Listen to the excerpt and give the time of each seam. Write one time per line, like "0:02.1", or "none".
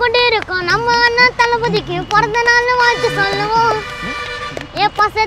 none